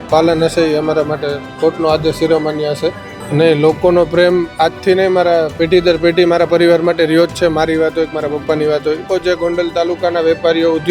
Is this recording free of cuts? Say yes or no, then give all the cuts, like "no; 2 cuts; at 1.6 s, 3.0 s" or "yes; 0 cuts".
no; 2 cuts; at 3.2 s, 9.1 s